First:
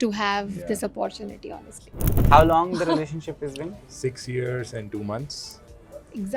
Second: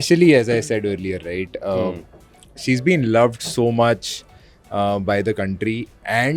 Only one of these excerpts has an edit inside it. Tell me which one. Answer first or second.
first